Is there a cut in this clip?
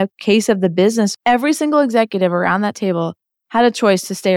yes; 1 cut; at 1.1 s

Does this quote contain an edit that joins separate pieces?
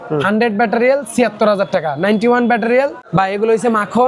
yes; 1 cut; at 3.0 s

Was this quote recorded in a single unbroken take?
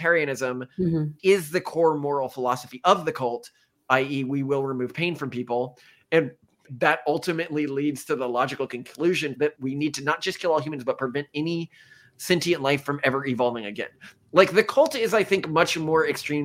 no; 3 cuts; at 1.1 s, 6.6 s, 9.5 s

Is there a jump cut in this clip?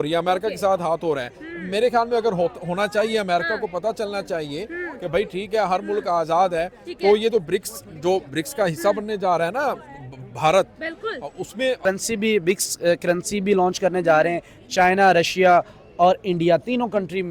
yes; 1 cut; at 11.8 s

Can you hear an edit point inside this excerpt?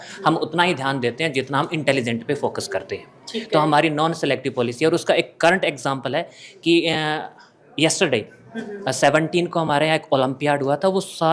no; 0 cuts

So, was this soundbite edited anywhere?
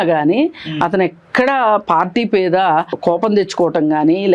yes; 1 cut; at 3.0 s

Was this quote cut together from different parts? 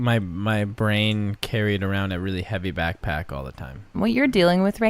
yes; 1 cut; at 3.8 s

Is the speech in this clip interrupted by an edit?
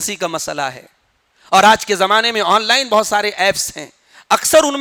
no; 0 cuts

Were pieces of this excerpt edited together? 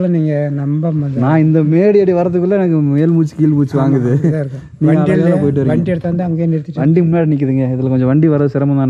no; 0 cuts

